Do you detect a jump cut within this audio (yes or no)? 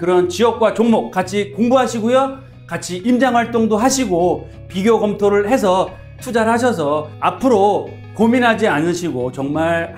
no